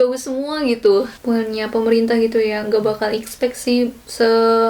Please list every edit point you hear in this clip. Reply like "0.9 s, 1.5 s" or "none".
1.1 s